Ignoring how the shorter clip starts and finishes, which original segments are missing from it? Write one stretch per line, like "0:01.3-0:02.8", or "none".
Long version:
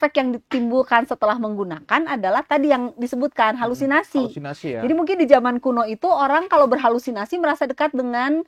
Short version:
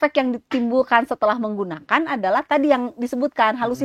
none